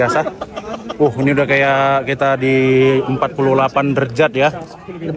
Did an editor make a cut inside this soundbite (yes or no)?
no